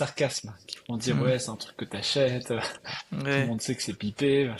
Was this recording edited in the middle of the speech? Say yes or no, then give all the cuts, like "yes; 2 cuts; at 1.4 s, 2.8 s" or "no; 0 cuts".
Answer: no; 0 cuts